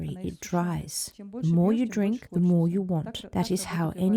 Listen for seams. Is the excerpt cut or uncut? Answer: uncut